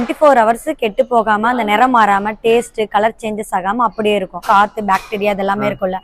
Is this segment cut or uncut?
cut